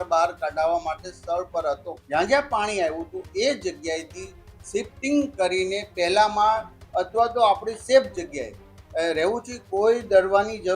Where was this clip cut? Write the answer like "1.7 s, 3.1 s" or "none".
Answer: 1.9 s